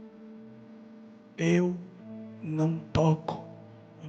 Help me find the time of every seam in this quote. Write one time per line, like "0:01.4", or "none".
none